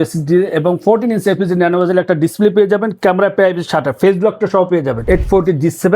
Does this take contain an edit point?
yes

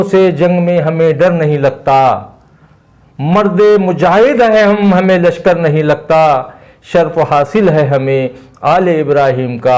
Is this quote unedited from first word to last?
yes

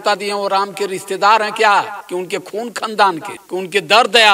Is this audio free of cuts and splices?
no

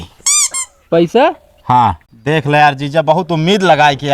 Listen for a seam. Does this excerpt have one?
yes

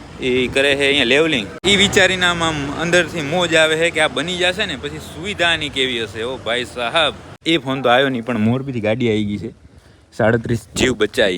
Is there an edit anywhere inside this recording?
yes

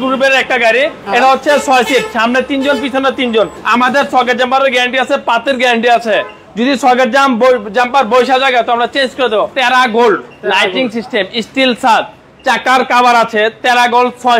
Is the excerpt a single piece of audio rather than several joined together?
no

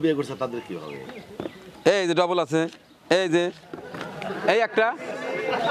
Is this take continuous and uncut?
yes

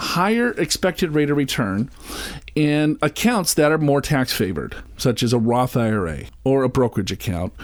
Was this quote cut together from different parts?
no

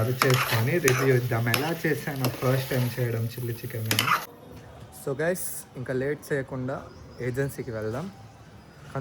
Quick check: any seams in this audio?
yes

